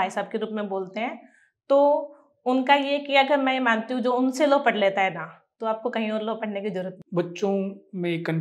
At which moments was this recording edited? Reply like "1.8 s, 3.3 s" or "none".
7.0 s